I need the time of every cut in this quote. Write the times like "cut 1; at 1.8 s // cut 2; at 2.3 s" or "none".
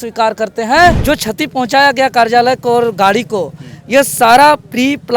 cut 1; at 1.0 s